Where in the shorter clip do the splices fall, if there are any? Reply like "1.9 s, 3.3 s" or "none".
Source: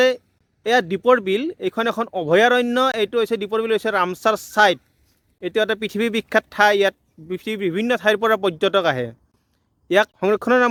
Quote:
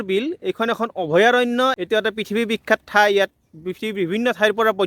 1.8 s